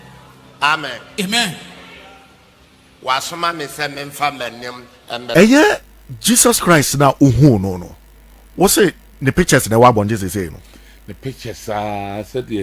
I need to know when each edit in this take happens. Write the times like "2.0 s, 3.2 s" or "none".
5.3 s